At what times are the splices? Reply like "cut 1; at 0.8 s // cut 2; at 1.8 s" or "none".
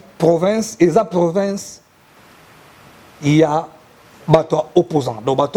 none